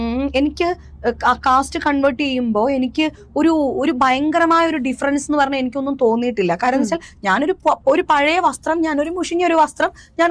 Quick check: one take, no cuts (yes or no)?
yes